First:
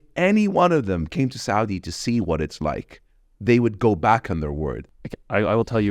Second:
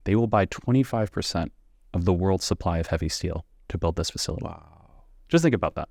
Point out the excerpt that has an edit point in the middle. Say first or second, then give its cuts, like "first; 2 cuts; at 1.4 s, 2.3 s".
first; 1 cut; at 4.8 s